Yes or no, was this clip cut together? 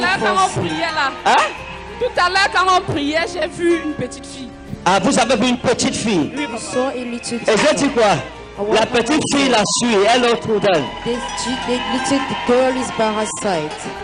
no